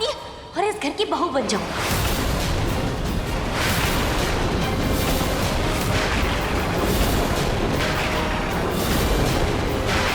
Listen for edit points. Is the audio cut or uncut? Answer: uncut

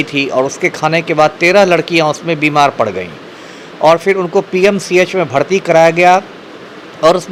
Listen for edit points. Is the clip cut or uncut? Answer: uncut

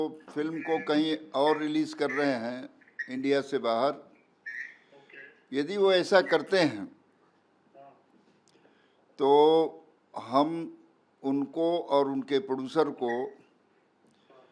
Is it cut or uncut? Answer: uncut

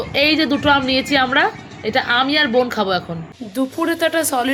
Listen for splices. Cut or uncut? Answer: uncut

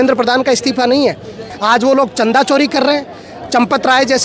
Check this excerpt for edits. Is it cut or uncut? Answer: cut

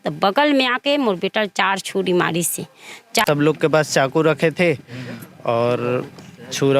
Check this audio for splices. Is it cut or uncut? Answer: cut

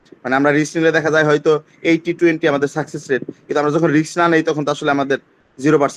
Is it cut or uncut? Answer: uncut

